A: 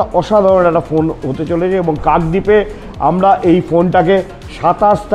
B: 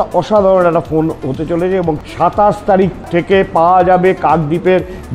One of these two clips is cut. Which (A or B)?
B